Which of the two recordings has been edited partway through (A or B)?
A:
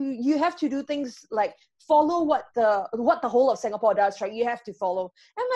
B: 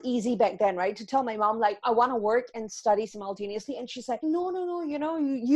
B